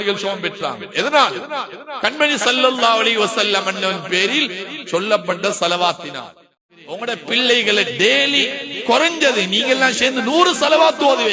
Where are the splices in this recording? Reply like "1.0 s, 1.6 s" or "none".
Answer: 6.6 s